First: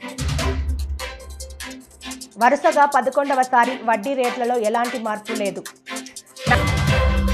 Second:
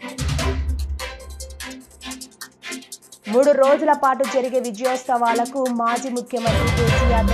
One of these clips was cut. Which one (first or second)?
first